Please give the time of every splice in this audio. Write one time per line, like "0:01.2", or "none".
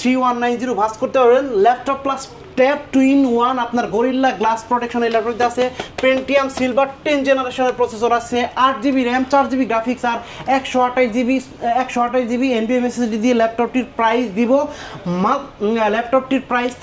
none